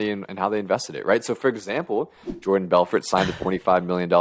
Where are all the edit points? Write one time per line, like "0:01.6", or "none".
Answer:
none